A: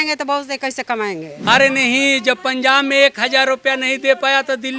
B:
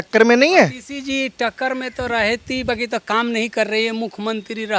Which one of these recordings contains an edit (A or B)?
A